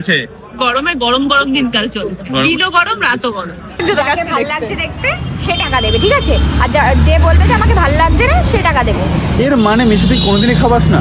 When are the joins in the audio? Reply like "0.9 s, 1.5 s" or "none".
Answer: 3.8 s